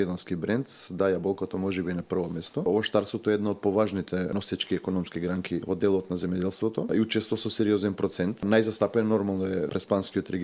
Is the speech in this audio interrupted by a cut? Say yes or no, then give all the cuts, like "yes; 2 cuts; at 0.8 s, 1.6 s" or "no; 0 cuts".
yes; 6 cuts; at 2.7 s, 4.3 s, 5.6 s, 6.9 s, 8.4 s, 9.7 s